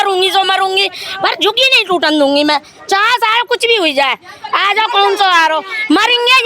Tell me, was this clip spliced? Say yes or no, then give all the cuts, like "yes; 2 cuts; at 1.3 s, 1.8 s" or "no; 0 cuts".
no; 0 cuts